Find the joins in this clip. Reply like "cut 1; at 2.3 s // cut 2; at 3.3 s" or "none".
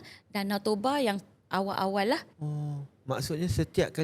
cut 1; at 2.3 s